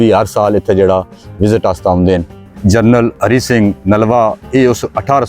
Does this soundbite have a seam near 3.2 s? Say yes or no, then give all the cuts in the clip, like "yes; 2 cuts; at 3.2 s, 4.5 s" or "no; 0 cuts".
yes; 2 cuts; at 2.4 s, 3.2 s